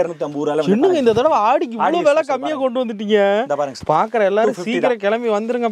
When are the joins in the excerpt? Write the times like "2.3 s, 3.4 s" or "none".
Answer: 3.8 s